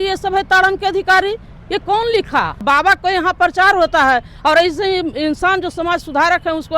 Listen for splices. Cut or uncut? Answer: cut